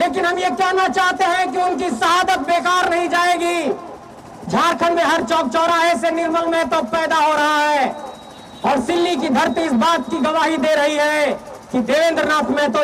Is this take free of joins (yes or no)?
yes